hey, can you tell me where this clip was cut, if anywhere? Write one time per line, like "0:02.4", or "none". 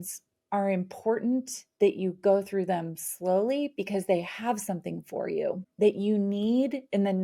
0:05.6